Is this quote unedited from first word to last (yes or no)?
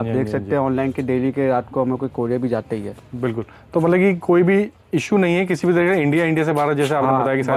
yes